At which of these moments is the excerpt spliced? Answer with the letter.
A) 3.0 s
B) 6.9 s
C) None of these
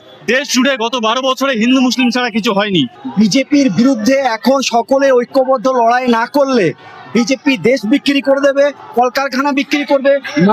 A